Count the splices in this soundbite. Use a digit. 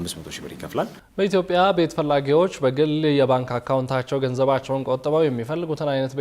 1